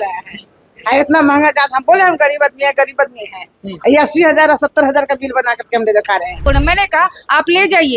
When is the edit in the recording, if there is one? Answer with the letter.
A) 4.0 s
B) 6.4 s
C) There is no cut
B